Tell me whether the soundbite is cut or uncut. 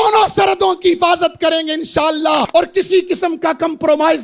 cut